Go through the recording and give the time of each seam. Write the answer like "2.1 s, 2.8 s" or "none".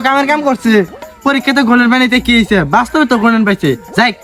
none